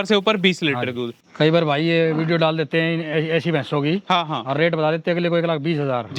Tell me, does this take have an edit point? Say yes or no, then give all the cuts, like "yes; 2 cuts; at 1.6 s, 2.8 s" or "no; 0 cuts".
yes; 1 cut; at 1.2 s